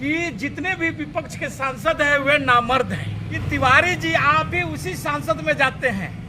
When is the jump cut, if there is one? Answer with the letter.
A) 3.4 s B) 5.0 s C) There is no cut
A